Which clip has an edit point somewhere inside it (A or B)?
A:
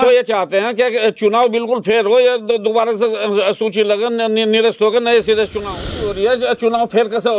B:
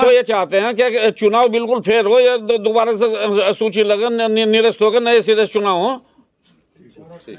A